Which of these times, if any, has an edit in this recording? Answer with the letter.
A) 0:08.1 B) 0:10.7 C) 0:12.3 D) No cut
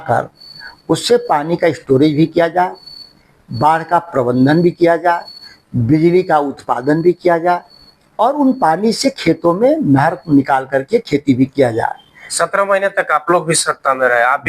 C